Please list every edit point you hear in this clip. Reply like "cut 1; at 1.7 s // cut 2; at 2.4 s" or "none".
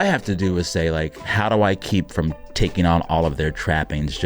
cut 1; at 1.3 s